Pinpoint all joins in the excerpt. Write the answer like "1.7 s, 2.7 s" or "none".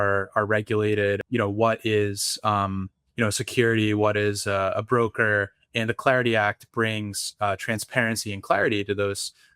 1.2 s